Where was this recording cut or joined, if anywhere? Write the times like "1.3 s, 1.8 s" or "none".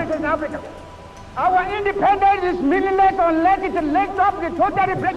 1.5 s